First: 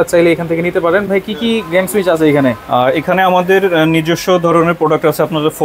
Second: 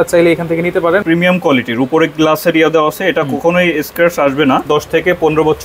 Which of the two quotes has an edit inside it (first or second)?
second